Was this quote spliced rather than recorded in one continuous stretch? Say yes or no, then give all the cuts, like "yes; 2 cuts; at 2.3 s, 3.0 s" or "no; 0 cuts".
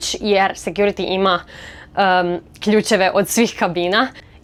no; 0 cuts